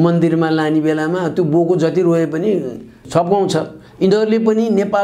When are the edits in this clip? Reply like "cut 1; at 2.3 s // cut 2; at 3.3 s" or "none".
cut 1; at 3.0 s